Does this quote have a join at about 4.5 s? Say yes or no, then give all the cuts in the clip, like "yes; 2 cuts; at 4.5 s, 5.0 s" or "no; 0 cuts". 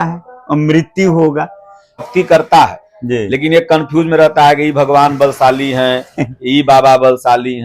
no; 1 cut; at 2.0 s